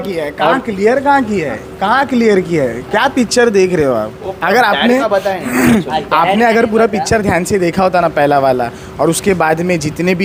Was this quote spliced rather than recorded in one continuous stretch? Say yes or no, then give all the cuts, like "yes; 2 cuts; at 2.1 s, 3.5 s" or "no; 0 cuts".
no; 0 cuts